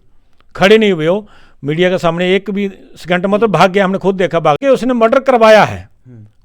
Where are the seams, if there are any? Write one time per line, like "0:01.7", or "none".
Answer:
0:04.6